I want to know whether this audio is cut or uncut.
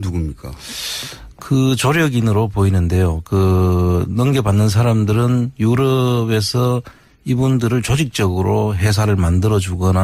cut